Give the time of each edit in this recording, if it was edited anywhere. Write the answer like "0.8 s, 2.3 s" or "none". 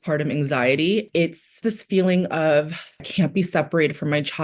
1.1 s, 3.0 s